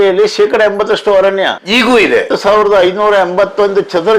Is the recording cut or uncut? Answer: cut